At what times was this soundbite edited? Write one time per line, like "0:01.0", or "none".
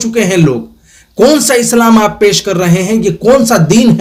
none

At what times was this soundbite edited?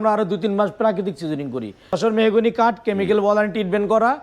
0:02.0

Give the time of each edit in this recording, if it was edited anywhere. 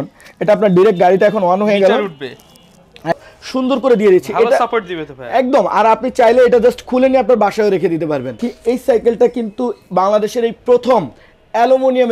0:03.1
0:08.5

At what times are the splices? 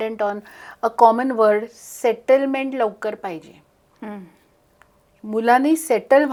none

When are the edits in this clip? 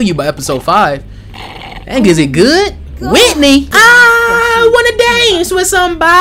0:03.7

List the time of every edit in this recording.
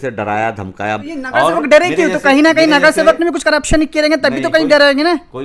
0:01.0

